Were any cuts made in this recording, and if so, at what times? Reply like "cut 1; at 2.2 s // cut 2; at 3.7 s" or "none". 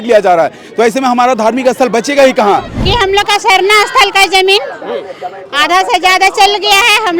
cut 1; at 2.8 s